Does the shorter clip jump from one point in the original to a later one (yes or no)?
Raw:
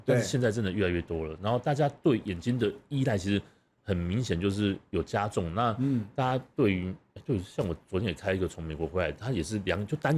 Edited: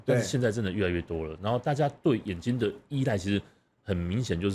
no